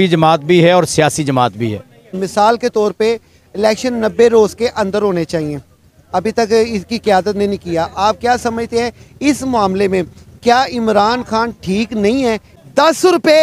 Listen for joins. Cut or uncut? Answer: cut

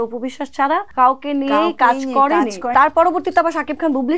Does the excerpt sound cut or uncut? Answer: cut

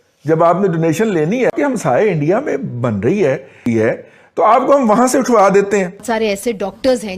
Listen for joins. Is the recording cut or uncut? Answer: cut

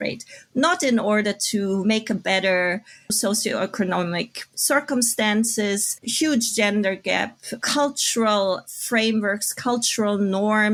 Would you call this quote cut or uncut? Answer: uncut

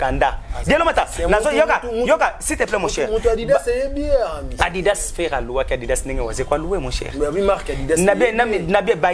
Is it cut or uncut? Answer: uncut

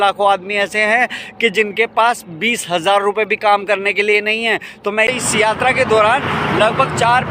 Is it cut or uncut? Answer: cut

